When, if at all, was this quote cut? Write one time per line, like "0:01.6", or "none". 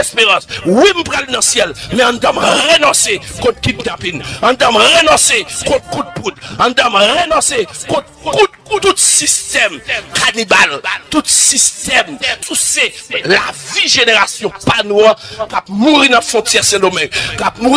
0:12.4